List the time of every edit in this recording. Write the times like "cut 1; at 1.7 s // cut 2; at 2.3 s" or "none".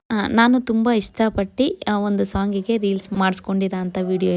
cut 1; at 3.1 s